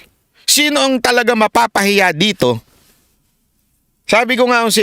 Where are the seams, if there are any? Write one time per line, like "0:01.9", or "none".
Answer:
none